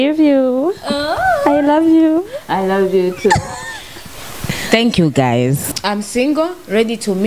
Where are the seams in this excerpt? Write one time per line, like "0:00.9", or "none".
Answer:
0:05.7